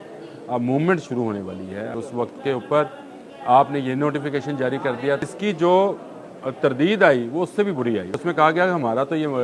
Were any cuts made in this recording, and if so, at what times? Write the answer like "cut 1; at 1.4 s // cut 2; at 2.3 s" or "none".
cut 1; at 1.9 s // cut 2; at 5.2 s // cut 3; at 8.1 s